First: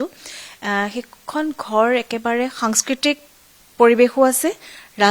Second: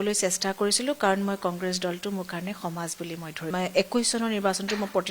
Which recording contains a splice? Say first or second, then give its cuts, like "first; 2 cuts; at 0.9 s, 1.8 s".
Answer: second; 1 cut; at 3.4 s